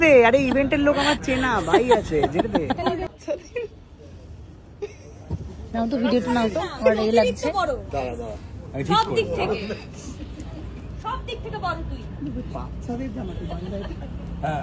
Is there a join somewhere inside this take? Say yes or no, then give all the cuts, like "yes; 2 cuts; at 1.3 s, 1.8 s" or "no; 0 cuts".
yes; 1 cut; at 3.1 s